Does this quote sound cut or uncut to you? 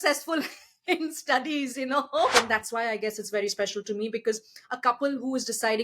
cut